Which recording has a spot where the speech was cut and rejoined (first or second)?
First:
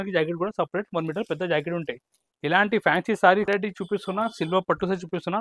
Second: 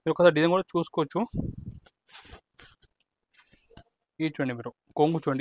first